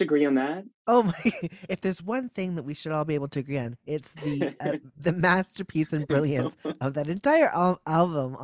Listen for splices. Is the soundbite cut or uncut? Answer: uncut